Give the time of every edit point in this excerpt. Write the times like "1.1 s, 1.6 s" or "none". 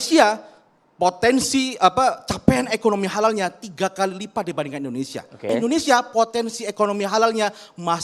5.5 s